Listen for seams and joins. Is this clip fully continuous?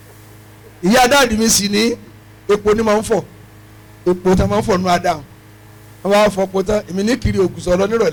yes; 0 cuts

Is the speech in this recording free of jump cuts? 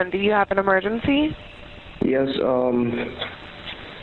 yes; 0 cuts

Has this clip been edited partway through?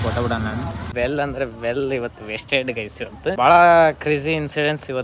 yes; 2 cuts; at 0.9 s, 3.4 s

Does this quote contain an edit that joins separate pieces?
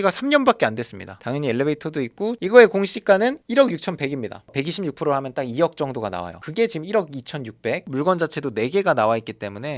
yes; 2 cuts; at 2.4 s, 7.8 s

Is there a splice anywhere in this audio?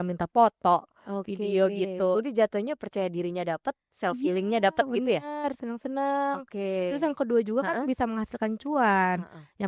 no; 0 cuts

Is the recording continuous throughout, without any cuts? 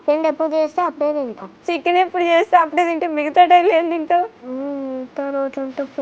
no; 2 cuts; at 1.5 s, 4.4 s

